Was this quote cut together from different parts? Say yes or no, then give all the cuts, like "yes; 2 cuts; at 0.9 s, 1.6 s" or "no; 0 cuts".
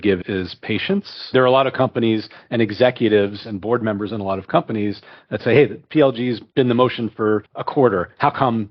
yes; 3 cuts; at 1.3 s, 6.4 s, 7.6 s